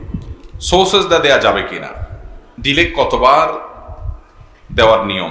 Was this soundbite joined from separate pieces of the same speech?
no; 0 cuts

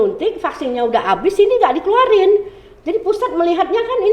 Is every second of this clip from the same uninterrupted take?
yes; 0 cuts

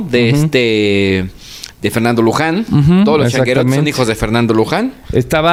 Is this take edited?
no; 0 cuts

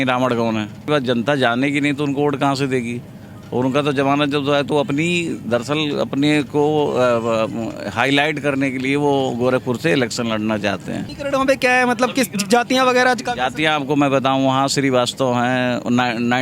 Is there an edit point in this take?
yes; 2 cuts; at 0.9 s, 11.1 s

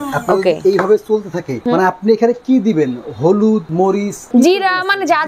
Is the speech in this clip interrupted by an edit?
yes; 2 cuts; at 1.6 s, 4.0 s

